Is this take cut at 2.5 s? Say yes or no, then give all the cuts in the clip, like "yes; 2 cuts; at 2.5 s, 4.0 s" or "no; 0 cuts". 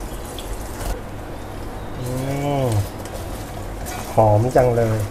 no; 1 cut; at 0.9 s